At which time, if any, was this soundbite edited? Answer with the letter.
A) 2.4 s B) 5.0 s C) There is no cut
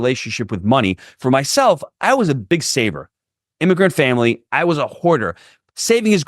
A